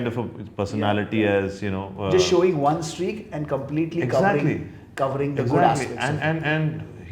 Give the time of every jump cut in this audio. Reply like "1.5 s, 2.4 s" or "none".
none